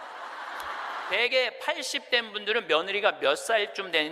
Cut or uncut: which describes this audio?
cut